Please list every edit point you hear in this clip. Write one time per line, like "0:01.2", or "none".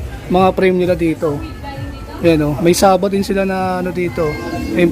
none